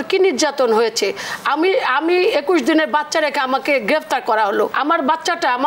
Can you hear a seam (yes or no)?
yes